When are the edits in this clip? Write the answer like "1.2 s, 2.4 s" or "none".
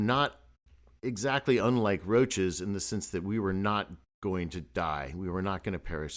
none